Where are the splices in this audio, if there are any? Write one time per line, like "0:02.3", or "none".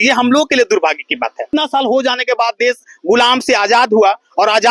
0:01.5